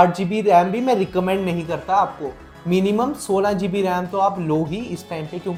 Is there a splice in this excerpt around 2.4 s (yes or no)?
no